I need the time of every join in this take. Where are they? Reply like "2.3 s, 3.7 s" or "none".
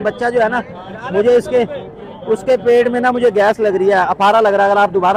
none